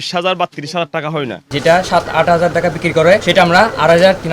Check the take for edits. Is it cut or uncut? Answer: cut